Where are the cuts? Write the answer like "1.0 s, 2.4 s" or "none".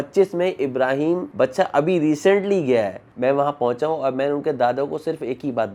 none